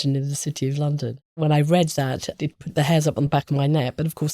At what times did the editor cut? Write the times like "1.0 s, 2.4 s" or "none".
1.3 s, 2.3 s, 3.3 s